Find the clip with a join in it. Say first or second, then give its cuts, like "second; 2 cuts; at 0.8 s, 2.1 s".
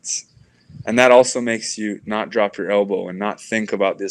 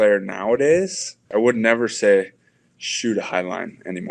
second; 1 cut; at 1.3 s